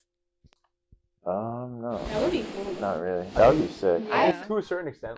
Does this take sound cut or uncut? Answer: uncut